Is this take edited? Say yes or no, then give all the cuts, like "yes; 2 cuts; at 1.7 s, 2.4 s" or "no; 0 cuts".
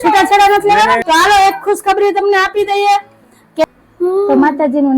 yes; 2 cuts; at 1.0 s, 3.6 s